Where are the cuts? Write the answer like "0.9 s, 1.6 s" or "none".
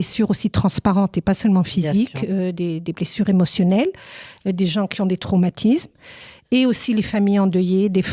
none